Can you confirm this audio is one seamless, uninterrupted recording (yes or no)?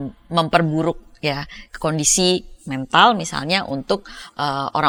yes